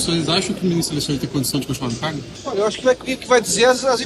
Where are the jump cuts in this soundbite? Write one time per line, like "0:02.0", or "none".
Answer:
0:02.3